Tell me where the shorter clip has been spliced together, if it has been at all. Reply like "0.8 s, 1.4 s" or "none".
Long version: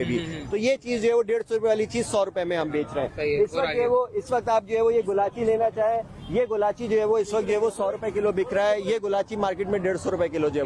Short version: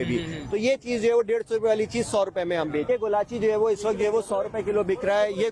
2.9 s